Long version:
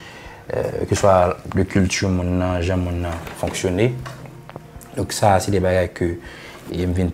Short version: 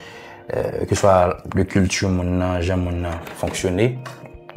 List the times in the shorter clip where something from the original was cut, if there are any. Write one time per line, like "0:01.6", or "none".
none